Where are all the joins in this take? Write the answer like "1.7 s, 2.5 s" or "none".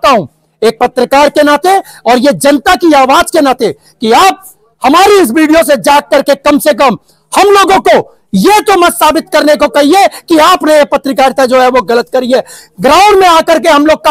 none